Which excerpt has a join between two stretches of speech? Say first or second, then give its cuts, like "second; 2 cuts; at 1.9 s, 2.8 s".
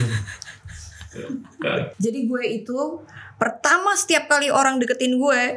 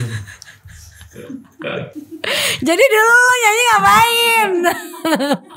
first; 1 cut; at 1.9 s